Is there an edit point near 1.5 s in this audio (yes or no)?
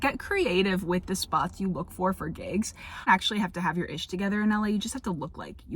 no